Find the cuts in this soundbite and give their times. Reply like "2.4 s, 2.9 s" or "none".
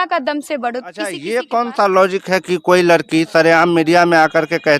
1.2 s